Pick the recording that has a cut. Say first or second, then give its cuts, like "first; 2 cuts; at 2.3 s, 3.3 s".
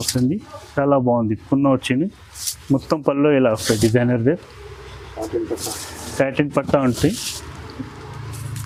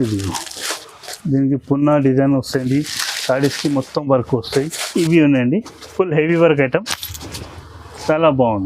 second; 1 cut; at 4.9 s